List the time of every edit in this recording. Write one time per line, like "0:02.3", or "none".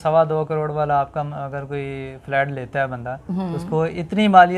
none